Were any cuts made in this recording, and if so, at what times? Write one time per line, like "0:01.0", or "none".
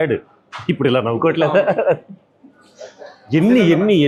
none